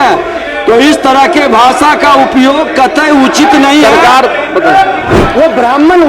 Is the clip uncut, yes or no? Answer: no